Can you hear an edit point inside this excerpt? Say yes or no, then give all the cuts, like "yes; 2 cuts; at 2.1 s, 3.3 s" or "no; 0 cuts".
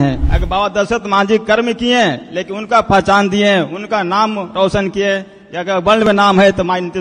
no; 0 cuts